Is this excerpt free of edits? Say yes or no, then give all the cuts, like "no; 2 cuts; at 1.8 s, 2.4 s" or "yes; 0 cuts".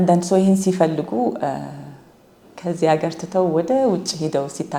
yes; 0 cuts